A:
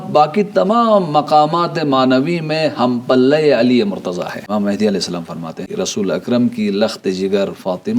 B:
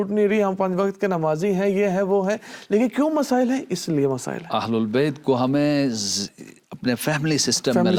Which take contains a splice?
A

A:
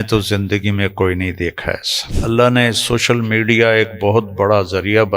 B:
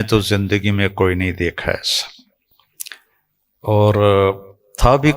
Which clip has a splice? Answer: A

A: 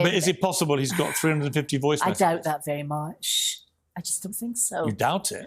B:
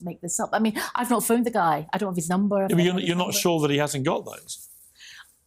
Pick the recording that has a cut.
B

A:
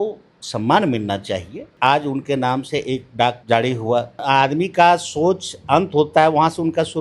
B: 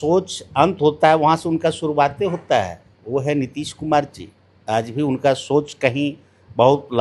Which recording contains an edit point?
A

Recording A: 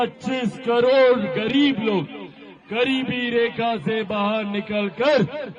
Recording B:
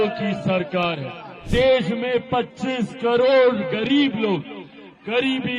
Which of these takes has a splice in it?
B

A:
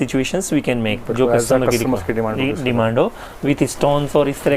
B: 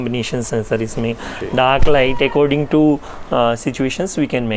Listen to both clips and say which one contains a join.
A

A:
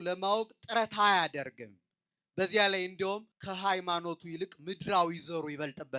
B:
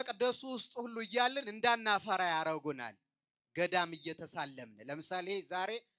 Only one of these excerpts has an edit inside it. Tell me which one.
A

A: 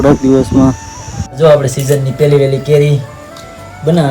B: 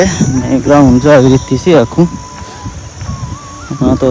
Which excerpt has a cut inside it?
A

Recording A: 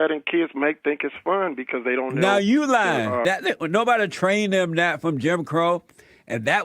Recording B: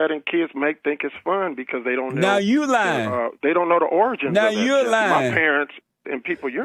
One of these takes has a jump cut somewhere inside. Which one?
A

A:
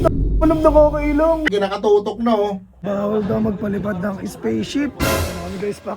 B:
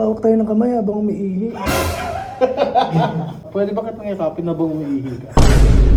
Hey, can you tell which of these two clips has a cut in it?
A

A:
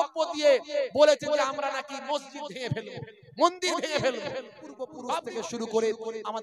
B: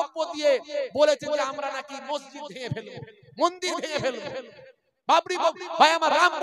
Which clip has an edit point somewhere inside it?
A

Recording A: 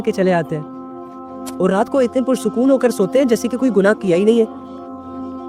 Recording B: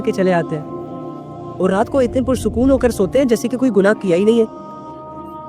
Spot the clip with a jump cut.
B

